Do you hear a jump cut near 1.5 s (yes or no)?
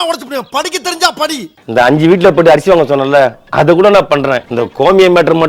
yes